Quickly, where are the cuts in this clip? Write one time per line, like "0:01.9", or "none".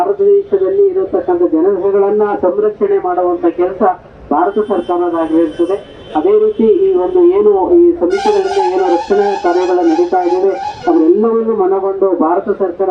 none